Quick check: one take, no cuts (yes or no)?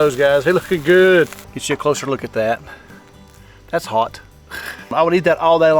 no